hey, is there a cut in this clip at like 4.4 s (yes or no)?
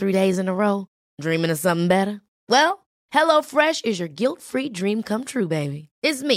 no